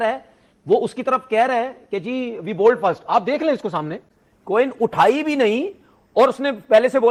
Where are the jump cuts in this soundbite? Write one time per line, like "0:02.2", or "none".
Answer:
none